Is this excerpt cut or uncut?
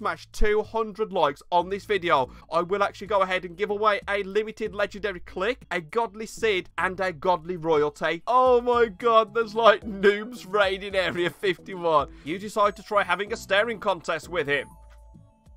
cut